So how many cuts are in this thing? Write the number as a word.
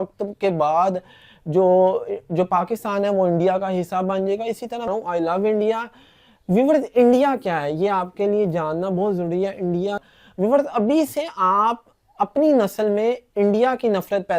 two